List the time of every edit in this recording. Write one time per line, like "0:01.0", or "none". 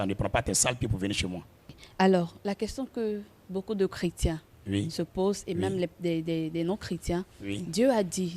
0:01.8